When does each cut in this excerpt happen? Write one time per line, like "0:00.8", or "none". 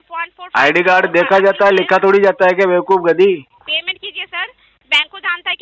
0:03.5

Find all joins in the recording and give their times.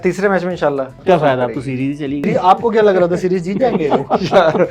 0:01.0
0:02.3

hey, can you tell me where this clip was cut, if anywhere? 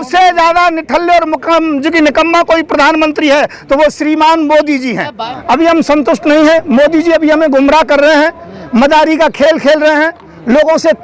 0:05.1

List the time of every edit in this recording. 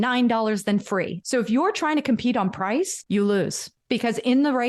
0:01.2
0:03.0
0:03.7

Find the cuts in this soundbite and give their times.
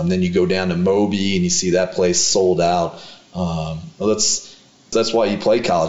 0:04.9

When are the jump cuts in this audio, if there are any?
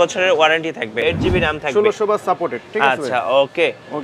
0:01.0

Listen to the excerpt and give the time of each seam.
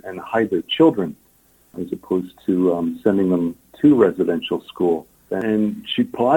0:01.8
0:05.3

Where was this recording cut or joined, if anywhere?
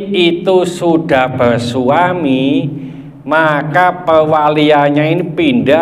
none

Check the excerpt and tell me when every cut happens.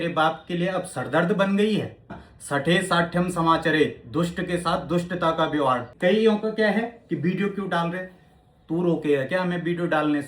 0:02.3
0:05.9

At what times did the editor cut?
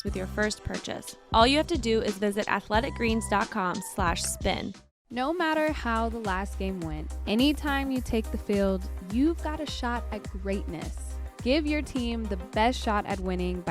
0:01.1
0:04.7

